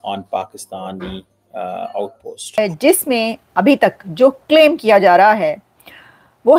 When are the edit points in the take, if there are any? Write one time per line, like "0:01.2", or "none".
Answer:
0:02.6